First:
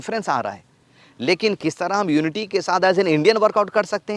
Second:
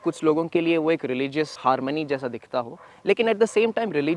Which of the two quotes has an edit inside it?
second; 1 cut; at 1.6 s

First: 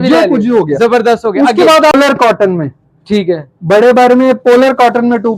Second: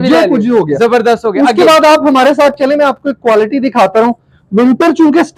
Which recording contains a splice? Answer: first; 1 cut; at 1.9 s

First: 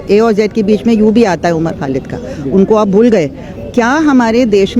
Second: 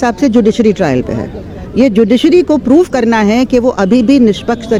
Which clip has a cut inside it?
first; 1 cut; at 3.6 s

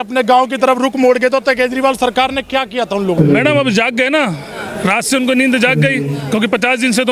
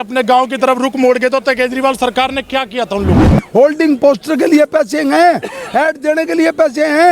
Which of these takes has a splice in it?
second; 1 cut; at 3.2 s

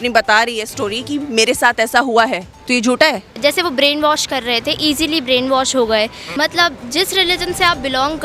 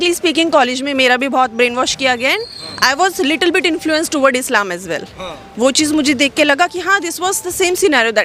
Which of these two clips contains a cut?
first; 3 cuts; at 2.5 s, 3.3 s, 6.2 s

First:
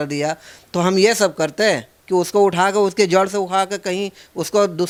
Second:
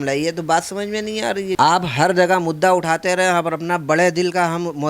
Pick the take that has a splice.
second; 1 cut; at 1.6 s

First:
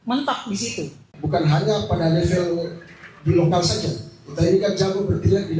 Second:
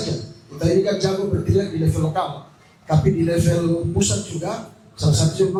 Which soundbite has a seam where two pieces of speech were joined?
first; 1 cut; at 1.1 s

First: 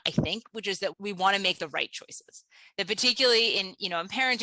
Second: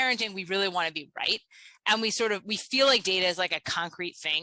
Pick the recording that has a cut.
first; 1 cut; at 1.0 s

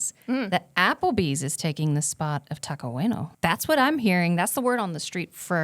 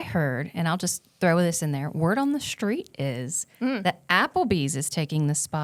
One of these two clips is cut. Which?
first; 1 cut; at 3.3 s

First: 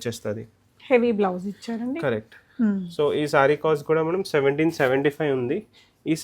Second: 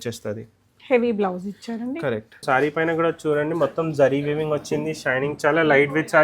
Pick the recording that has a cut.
second; 1 cut; at 2.4 s

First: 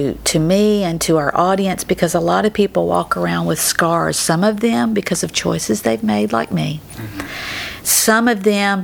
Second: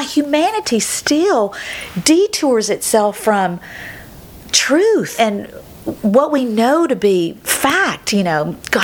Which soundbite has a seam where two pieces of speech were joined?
second; 1 cut; at 5.1 s

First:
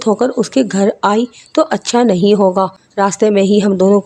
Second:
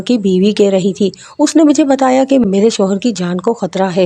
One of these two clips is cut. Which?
second; 1 cut; at 2.4 s

